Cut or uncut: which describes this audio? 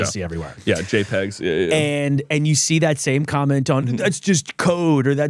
cut